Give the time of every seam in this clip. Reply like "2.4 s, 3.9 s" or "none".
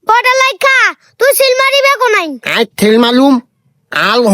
2.4 s